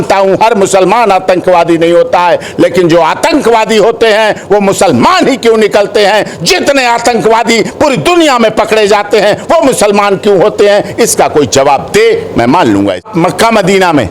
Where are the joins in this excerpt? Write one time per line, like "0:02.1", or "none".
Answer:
0:13.1